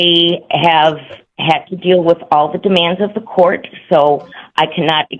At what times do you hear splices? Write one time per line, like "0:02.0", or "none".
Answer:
none